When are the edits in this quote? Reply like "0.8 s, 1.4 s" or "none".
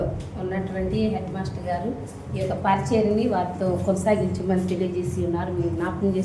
none